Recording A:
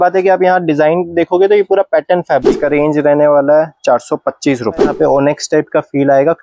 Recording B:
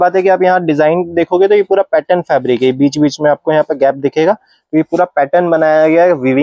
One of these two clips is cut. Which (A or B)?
A